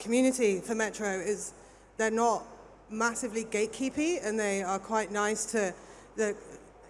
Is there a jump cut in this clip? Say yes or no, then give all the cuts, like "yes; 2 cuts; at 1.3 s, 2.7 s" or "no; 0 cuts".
no; 0 cuts